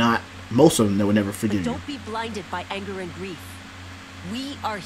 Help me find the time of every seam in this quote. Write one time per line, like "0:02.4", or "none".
none